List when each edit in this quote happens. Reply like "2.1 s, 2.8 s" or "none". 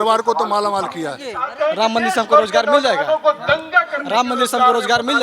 1.5 s